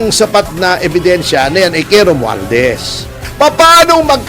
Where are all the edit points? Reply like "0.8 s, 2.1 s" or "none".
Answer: 3.2 s